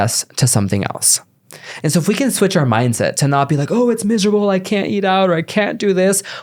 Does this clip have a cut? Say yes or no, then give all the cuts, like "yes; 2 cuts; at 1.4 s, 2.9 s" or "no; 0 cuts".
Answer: no; 0 cuts